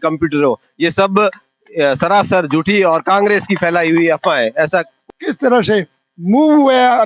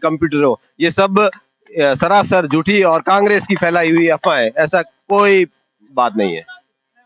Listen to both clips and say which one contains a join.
first; 1 cut; at 5.0 s

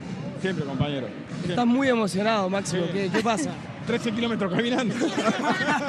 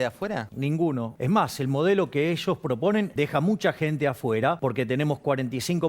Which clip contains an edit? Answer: second; 3 cuts; at 0.9 s, 3.1 s, 4.6 s

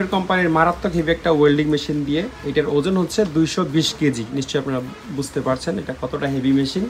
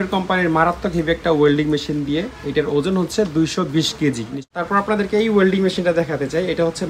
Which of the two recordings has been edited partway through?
second; 1 cut; at 4.4 s

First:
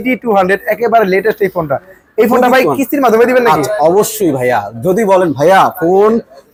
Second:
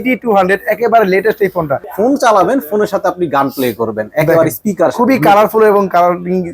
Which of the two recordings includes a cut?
second; 1 cut; at 1.8 s

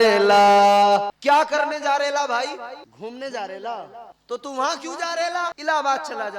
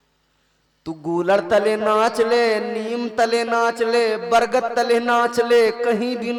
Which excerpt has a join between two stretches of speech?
first; 4 cuts; at 1.1 s, 2.9 s, 4.1 s, 5.6 s

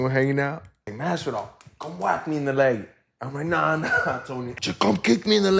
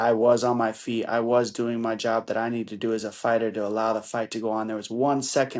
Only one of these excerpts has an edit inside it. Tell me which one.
first; 2 cuts; at 0.9 s, 4.5 s

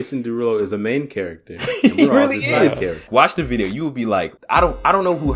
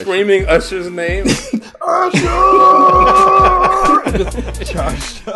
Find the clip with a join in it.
first; 2 cuts; at 3.1 s, 4.4 s

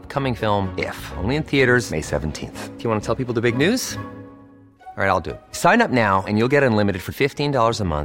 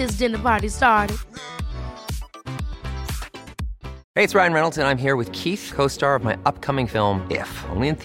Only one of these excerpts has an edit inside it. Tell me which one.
second; 1 cut; at 4.0 s

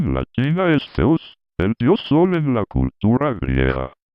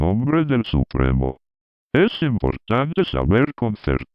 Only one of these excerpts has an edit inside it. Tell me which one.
first; 1 cut; at 1.8 s

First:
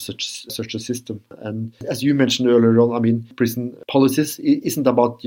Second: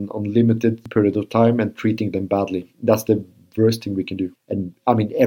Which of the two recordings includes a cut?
first; 2 cuts; at 1.3 s, 3.3 s

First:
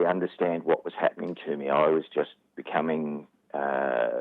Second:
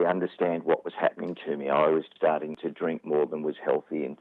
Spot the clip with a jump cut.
second; 1 cut; at 2.4 s

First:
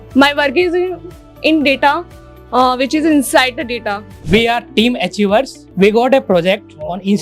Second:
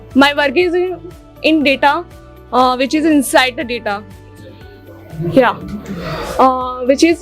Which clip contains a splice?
first; 2 cuts; at 4.1 s, 5.6 s

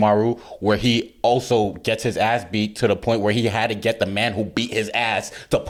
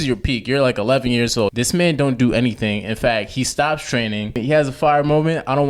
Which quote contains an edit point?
second; 2 cuts; at 1.5 s, 4.4 s

